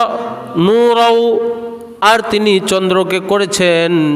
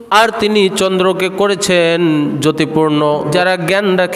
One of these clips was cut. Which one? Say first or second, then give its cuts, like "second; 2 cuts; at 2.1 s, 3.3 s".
second; 1 cut; at 3.3 s